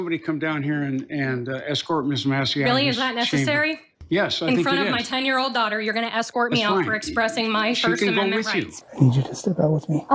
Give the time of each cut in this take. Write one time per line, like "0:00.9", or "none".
0:03.9
0:08.8